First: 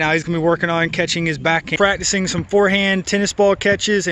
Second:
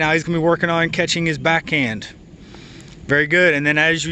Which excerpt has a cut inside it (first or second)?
first